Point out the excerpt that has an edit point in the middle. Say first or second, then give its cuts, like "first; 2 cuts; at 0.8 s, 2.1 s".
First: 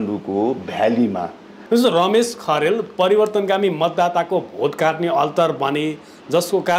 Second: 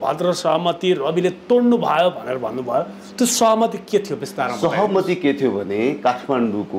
first; 1 cut; at 1.5 s